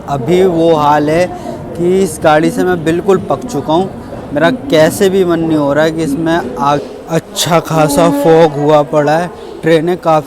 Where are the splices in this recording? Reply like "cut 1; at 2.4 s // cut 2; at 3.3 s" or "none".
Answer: cut 1; at 6.8 s